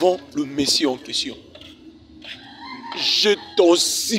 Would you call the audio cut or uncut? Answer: cut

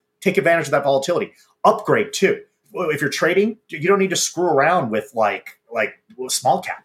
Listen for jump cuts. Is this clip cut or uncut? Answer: cut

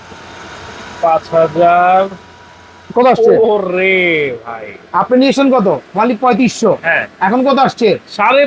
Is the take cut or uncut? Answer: uncut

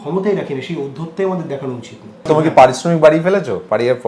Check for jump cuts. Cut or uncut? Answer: cut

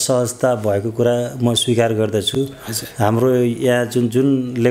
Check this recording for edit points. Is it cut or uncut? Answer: uncut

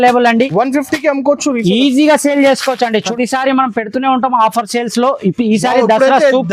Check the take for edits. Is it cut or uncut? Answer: cut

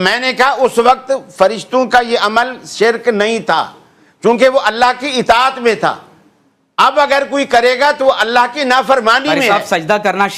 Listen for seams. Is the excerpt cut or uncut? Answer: uncut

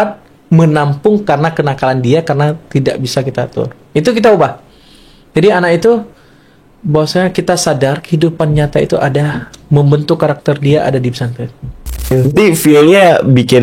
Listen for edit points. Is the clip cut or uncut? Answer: cut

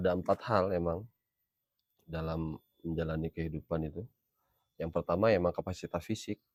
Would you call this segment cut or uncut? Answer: uncut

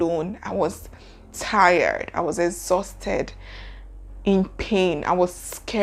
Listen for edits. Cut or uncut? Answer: uncut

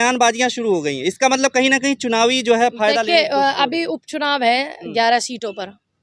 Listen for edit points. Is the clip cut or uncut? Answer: uncut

